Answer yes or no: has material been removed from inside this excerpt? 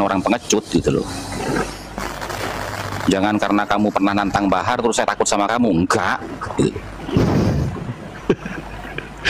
no